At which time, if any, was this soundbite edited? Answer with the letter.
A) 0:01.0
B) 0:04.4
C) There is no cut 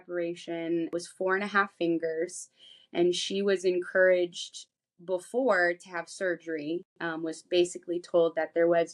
A